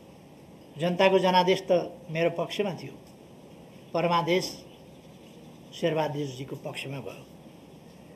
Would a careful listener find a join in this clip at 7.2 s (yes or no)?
no